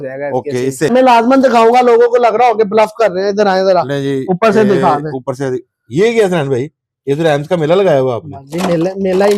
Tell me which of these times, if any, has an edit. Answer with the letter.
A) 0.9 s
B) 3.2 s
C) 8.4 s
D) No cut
A